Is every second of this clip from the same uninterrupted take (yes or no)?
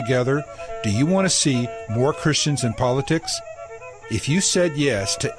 yes